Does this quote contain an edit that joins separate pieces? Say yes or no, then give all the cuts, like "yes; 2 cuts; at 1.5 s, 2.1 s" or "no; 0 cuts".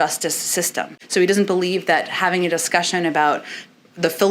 yes; 1 cut; at 1.0 s